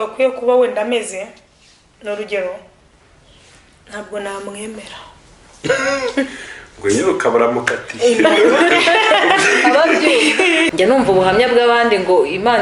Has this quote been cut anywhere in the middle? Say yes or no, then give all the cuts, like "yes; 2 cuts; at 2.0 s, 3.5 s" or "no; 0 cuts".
yes; 1 cut; at 10.7 s